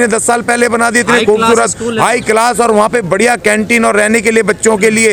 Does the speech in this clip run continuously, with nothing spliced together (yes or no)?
yes